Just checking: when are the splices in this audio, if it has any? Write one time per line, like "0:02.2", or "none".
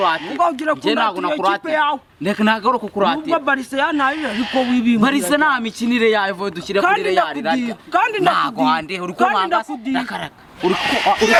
none